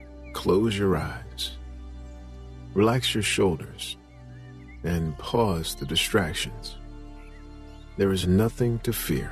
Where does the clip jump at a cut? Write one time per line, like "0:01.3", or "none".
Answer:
none